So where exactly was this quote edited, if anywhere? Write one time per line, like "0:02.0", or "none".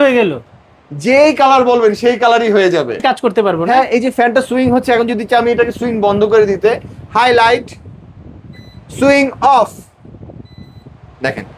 none